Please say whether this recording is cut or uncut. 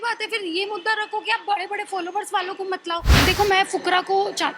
cut